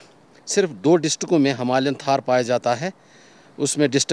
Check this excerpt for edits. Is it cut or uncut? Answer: uncut